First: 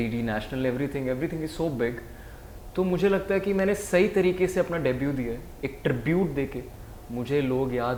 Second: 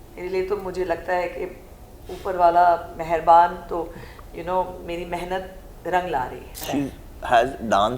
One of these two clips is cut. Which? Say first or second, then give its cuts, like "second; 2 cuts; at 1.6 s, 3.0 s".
second; 1 cut; at 6.6 s